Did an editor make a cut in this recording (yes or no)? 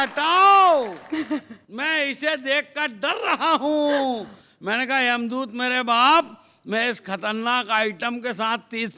no